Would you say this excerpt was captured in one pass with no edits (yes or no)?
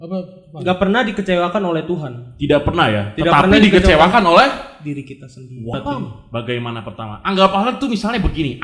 no